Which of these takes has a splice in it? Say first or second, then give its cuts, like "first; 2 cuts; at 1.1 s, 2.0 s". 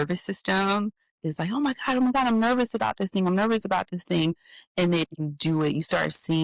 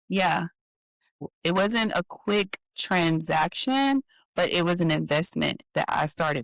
second; 1 cut; at 1.2 s